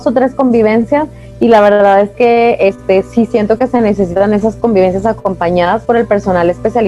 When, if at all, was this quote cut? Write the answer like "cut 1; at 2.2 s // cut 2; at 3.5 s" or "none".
none